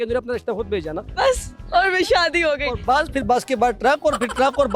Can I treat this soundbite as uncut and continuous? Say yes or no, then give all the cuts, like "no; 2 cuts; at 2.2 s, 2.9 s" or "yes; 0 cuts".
no; 1 cut; at 1.1 s